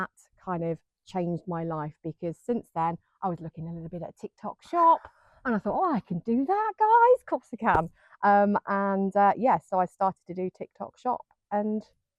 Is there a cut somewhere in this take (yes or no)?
no